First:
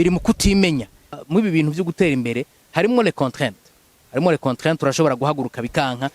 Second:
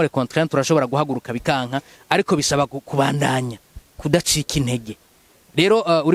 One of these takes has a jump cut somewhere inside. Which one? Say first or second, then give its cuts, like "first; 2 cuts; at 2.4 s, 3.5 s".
first; 1 cut; at 1.2 s